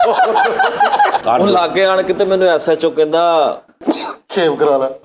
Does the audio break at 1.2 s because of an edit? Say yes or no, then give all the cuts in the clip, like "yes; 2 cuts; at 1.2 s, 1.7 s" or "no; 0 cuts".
yes; 1 cut; at 1.2 s